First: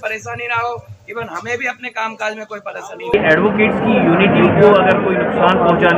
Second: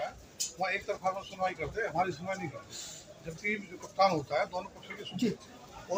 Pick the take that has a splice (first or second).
first